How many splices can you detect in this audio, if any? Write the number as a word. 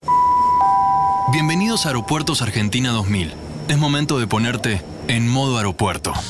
one